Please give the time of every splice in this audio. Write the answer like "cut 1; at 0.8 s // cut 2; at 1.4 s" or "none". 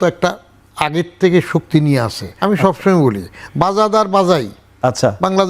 cut 1; at 2.3 s